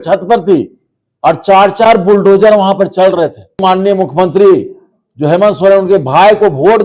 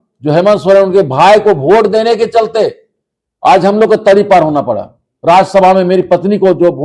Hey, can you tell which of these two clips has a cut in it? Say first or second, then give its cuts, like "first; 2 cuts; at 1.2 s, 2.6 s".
first; 1 cut; at 3.6 s